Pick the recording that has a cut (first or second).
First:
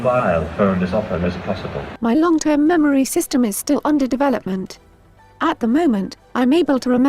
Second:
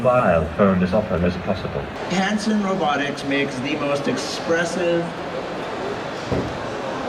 first